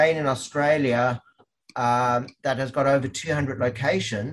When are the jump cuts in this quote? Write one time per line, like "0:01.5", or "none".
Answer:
none